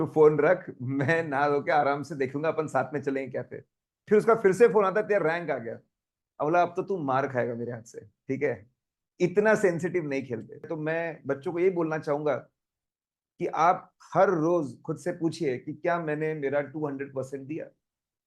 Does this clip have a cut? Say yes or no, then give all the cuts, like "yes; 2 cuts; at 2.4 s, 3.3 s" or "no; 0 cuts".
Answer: yes; 1 cut; at 10.7 s